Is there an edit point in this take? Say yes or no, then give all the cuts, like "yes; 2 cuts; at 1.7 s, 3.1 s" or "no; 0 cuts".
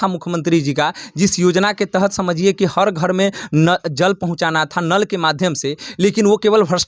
no; 0 cuts